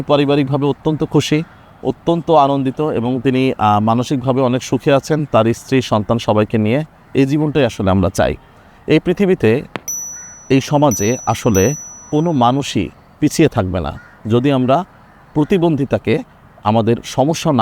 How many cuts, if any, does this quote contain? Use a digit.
0